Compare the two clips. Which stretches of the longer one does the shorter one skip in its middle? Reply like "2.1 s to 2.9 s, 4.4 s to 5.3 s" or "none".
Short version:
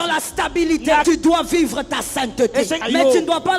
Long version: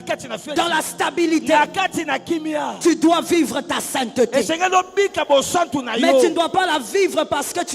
1.7 s to 2.8 s, 4.6 s to 5.9 s